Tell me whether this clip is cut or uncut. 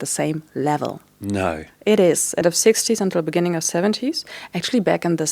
cut